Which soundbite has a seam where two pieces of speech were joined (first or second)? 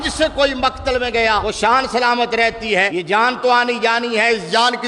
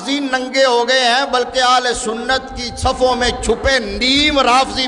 first